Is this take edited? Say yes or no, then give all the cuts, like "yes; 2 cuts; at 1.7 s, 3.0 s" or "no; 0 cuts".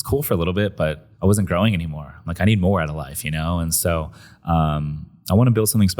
yes; 1 cut; at 1.1 s